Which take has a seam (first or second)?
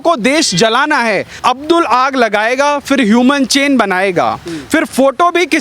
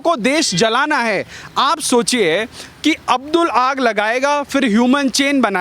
first